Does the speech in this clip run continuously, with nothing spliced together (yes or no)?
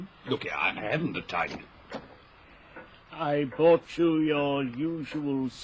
no